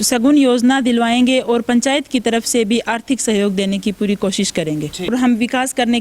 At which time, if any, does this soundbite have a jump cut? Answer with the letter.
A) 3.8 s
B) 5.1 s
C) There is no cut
B